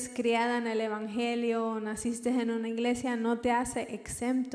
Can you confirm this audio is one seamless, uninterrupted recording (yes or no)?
yes